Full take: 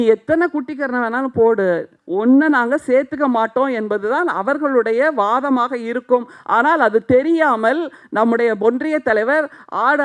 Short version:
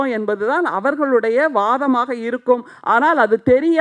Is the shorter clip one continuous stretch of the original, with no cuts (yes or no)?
yes